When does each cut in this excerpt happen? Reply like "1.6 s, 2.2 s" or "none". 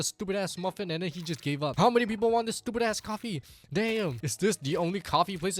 1.7 s, 4.2 s